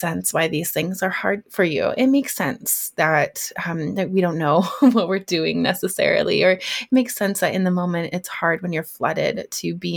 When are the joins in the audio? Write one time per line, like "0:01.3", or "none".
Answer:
0:01.4